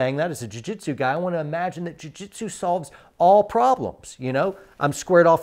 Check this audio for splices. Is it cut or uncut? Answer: uncut